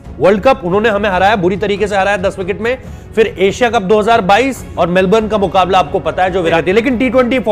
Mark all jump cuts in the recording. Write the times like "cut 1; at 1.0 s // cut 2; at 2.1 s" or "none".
cut 1; at 4.7 s // cut 2; at 6.6 s